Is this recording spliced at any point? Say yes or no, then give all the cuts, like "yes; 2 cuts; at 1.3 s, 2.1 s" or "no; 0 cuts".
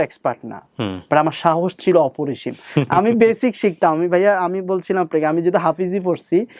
no; 0 cuts